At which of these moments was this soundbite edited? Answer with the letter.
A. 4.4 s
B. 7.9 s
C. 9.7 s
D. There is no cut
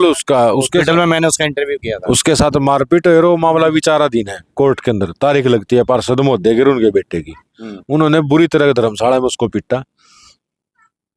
D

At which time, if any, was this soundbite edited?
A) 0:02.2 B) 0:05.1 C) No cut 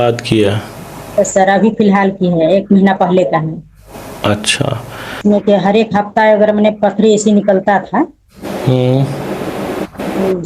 B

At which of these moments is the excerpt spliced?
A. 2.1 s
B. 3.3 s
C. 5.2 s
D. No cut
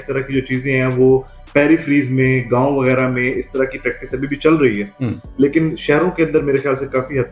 D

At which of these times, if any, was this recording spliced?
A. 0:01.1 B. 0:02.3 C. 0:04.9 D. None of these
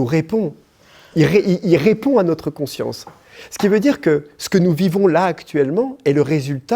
D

